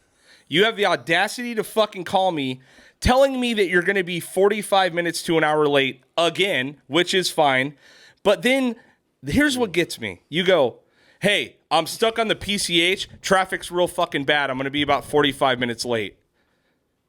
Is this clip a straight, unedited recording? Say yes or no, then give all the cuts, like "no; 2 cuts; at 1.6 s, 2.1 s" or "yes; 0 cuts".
yes; 0 cuts